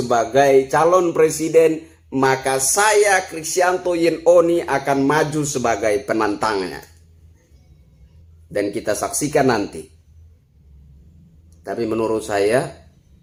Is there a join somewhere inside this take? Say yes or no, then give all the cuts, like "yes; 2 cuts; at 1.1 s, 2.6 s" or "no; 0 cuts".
no; 0 cuts